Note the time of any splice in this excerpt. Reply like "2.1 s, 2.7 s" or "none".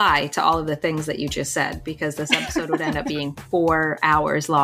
none